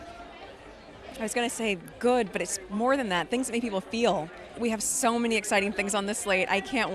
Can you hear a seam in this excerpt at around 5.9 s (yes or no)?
no